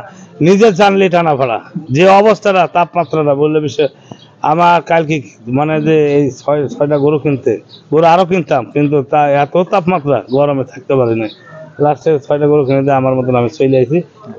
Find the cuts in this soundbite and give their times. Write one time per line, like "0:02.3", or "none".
none